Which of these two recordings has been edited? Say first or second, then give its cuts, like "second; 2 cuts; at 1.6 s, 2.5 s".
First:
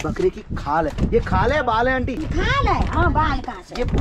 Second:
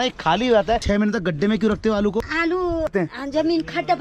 second; 2 cuts; at 0.8 s, 2.9 s